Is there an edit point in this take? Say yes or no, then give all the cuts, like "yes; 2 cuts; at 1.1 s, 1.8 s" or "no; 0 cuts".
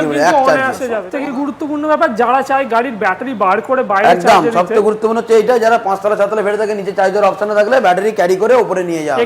yes; 1 cut; at 1.0 s